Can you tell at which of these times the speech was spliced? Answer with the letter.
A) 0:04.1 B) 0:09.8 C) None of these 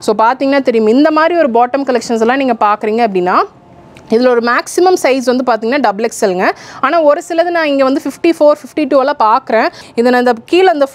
B